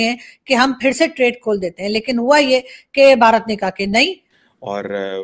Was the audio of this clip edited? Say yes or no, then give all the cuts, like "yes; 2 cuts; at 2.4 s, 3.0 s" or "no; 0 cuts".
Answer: yes; 1 cut; at 4.3 s